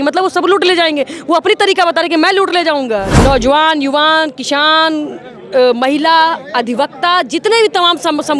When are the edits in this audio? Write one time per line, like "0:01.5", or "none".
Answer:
0:03.1